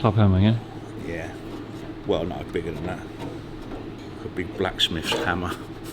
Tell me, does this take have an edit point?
yes; 2 cuts; at 1.8 s, 4.0 s

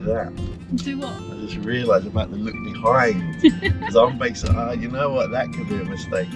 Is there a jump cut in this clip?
no; 0 cuts

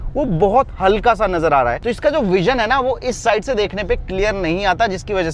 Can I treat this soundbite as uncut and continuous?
yes; 0 cuts

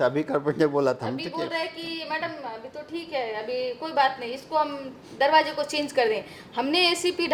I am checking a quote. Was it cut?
no; 0 cuts

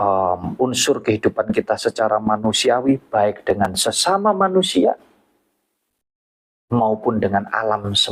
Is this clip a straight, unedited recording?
yes; 0 cuts

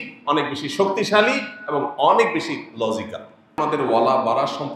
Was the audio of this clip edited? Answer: yes; 1 cut; at 3.5 s

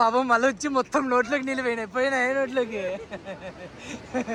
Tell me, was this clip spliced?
no; 0 cuts

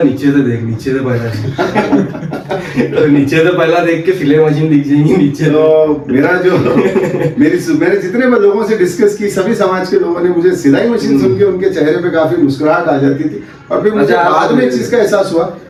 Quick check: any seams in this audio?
no; 0 cuts

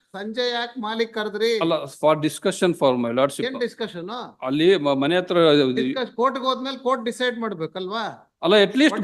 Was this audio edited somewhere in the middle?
no; 0 cuts

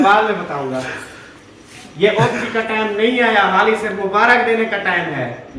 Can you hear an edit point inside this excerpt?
yes; 1 cut; at 2.4 s

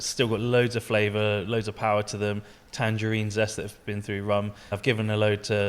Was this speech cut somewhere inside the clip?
yes; 1 cut; at 4.7 s

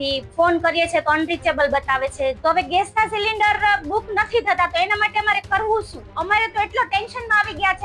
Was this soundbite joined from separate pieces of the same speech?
yes; 2 cuts; at 2.4 s, 6.1 s

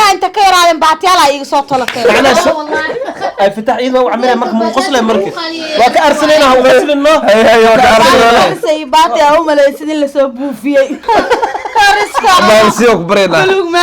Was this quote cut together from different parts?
yes; 1 cut; at 11.0 s

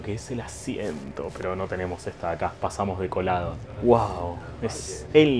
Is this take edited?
no; 0 cuts

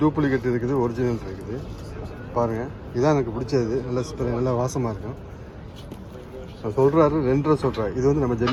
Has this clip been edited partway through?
no; 0 cuts

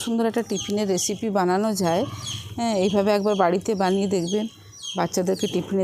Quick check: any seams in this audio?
no; 0 cuts

